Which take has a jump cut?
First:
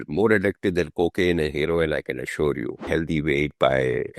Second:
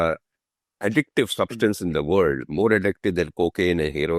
first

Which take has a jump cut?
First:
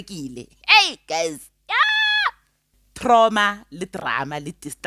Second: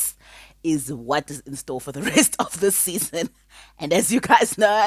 first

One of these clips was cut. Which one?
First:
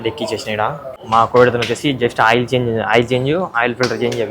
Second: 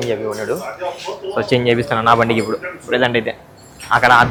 first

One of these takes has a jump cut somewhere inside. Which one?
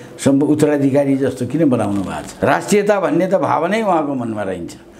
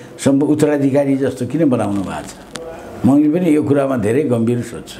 first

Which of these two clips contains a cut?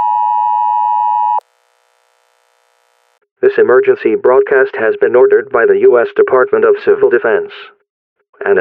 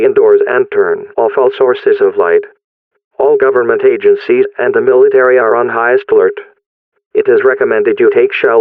first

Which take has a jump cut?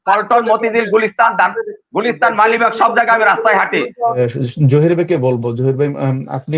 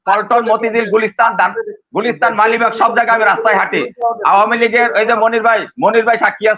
first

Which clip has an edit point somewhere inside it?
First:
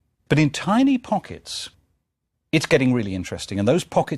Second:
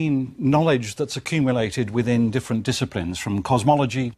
second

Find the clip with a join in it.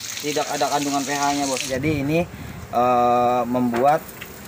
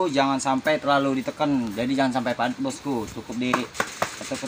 first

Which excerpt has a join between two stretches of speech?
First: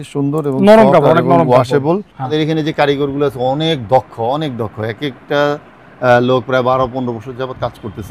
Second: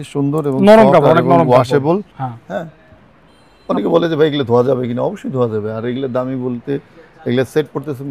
first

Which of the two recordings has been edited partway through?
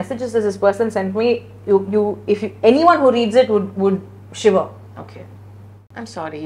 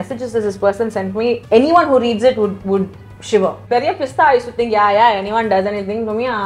second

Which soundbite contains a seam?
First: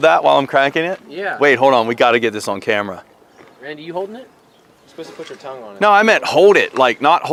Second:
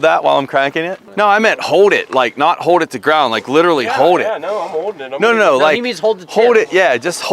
second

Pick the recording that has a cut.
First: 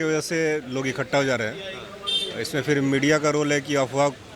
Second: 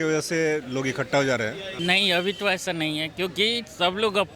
second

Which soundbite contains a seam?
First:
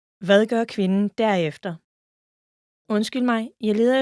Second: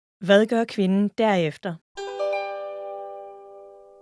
second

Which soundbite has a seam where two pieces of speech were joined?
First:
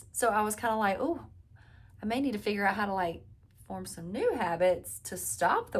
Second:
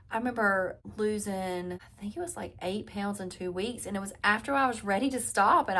second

